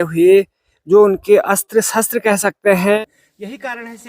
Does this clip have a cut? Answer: yes; 1 cut; at 3.0 s

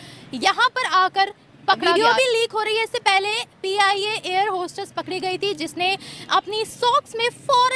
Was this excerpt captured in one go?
yes; 0 cuts

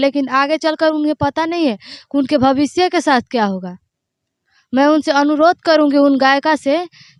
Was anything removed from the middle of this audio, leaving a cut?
no; 0 cuts

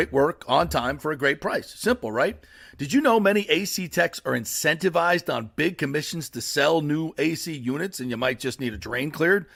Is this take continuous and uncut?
yes; 0 cuts

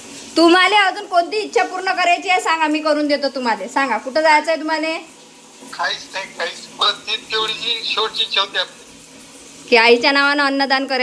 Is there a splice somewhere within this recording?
no; 0 cuts

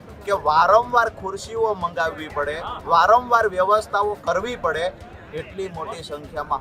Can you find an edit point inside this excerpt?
no; 0 cuts

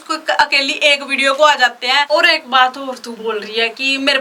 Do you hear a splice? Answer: yes; 2 cuts; at 2.1 s, 3.1 s

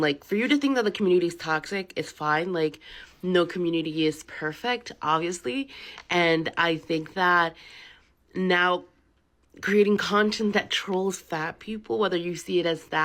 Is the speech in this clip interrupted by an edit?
no; 0 cuts

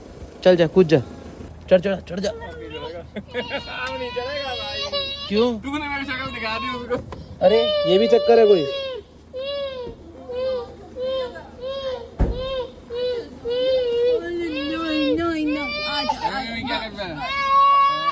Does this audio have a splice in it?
yes; 1 cut; at 1.5 s

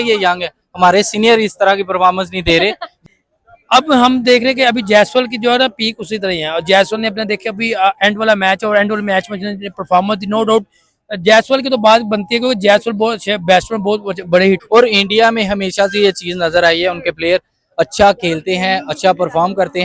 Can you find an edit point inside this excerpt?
yes; 2 cuts; at 3.1 s, 14.6 s

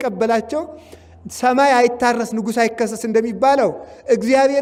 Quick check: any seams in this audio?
no; 0 cuts

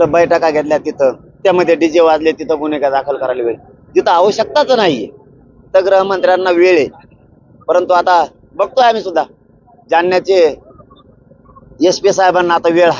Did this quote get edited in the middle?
yes; 1 cut; at 1.4 s

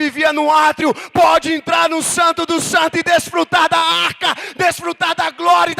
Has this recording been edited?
no; 0 cuts

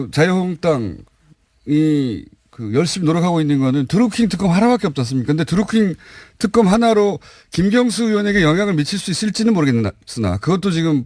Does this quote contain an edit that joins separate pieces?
yes; 1 cut; at 9.6 s

